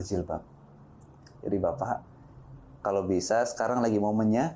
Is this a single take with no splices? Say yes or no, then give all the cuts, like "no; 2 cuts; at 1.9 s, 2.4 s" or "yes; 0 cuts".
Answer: yes; 0 cuts